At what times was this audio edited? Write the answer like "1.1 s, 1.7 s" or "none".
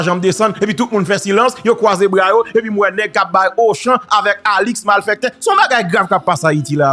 none